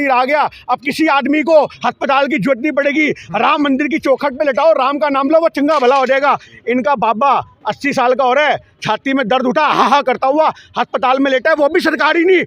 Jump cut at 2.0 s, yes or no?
no